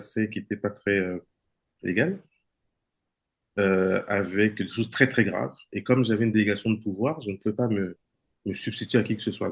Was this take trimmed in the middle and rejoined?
no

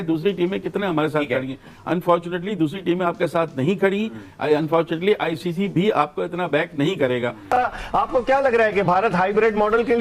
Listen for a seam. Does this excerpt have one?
yes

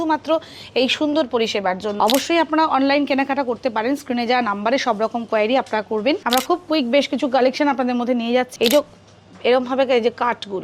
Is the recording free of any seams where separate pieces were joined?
no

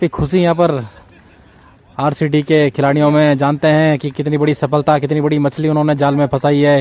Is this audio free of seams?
yes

